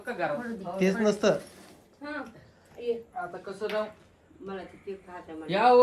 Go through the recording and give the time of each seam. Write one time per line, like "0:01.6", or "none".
none

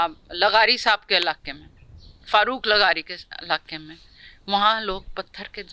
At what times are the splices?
none

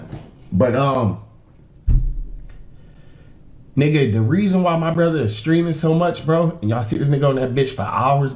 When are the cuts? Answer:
none

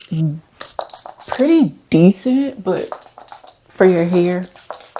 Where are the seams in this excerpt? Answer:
none

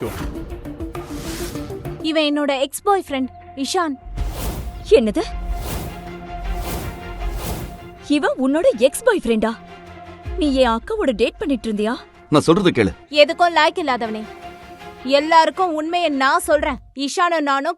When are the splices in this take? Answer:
0:02.0

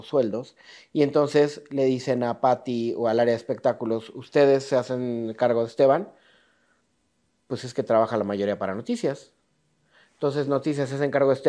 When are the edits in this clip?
none

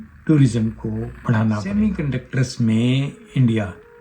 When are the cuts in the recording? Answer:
0:01.6

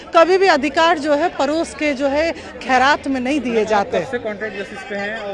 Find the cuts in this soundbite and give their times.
none

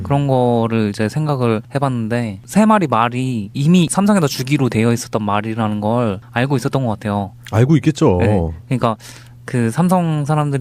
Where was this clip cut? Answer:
0:07.2

